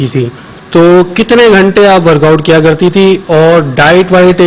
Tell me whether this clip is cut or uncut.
uncut